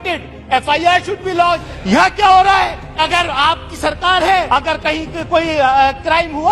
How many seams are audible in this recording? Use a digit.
3